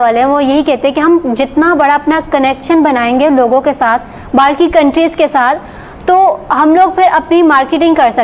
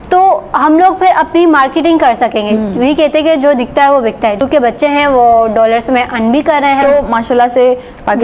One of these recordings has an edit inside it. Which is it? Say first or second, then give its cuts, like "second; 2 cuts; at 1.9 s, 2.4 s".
second; 2 cuts; at 4.4 s, 6.8 s